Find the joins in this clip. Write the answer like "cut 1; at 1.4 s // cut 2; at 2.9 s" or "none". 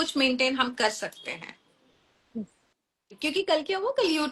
cut 1; at 3.1 s